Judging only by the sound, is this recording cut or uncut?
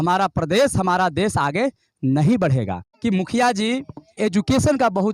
cut